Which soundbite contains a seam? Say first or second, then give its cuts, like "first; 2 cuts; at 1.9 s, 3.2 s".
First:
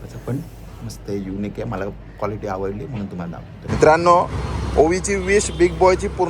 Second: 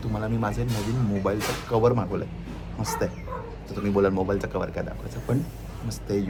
first; 1 cut; at 3.6 s